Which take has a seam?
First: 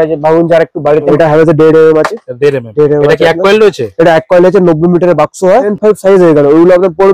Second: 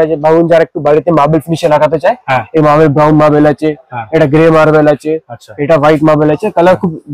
first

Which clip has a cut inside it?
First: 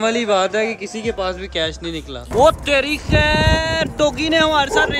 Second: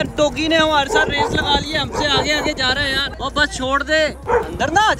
first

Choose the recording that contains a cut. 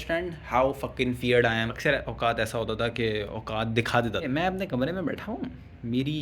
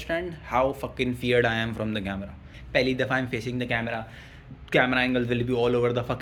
first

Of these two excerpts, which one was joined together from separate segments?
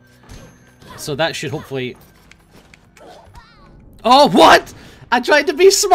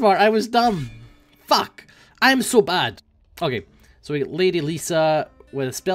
second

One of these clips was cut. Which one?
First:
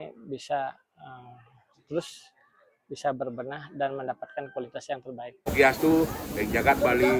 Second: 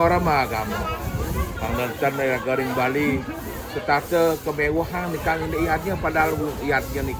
first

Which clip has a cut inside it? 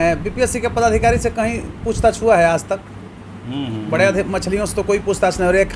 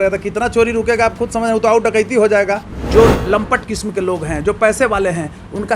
second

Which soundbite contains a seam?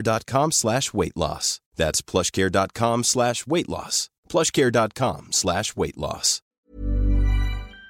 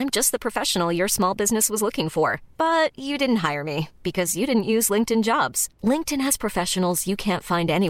first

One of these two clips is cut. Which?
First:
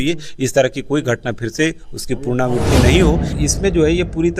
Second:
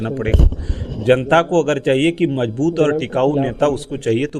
first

